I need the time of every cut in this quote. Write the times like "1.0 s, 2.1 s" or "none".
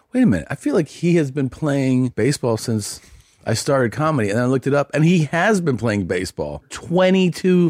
2.1 s, 6.7 s